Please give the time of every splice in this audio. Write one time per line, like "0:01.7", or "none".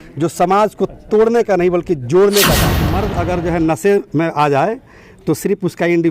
0:02.9